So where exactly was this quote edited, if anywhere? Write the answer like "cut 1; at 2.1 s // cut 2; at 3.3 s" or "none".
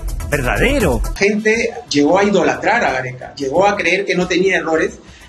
cut 1; at 1.1 s